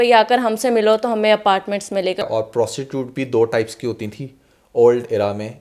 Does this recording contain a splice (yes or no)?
yes